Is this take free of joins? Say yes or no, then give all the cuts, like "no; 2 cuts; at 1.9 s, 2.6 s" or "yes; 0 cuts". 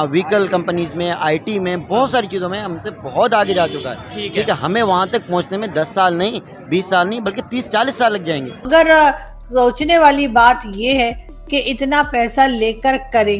no; 1 cut; at 8.6 s